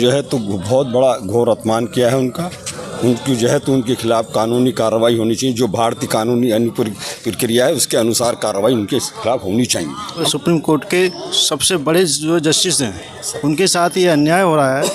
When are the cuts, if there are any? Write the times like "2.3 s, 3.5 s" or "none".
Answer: 10.3 s